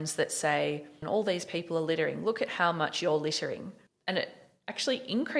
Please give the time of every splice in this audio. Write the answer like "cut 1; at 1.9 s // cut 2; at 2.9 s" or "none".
cut 1; at 1.0 s // cut 2; at 3.8 s